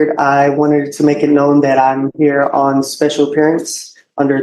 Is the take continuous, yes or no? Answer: yes